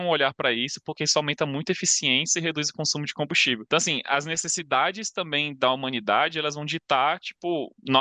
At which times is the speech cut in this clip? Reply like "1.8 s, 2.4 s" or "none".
3.6 s